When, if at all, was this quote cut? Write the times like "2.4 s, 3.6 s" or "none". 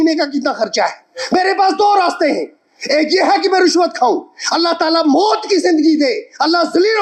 none